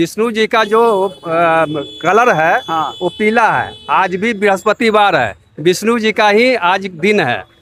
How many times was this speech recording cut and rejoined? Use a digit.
0